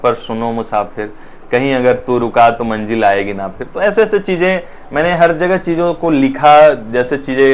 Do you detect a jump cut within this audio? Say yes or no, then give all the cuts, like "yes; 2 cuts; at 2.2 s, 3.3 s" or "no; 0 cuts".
no; 0 cuts